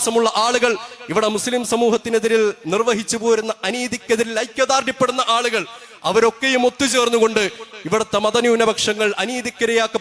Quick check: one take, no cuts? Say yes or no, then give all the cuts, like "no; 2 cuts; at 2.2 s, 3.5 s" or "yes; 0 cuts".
yes; 0 cuts